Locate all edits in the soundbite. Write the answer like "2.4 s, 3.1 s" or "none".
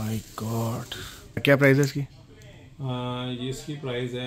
1.4 s